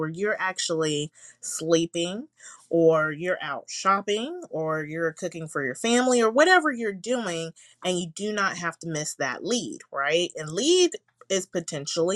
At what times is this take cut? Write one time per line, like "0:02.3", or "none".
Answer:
none